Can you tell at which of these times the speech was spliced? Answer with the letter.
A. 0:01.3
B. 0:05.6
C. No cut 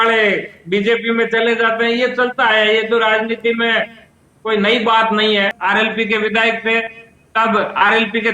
B